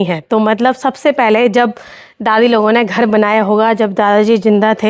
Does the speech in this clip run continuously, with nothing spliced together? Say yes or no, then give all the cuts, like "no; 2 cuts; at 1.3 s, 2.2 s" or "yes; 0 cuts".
yes; 0 cuts